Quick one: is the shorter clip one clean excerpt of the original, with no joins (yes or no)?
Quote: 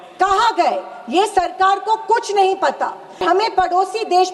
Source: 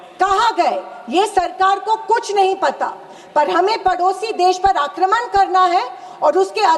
no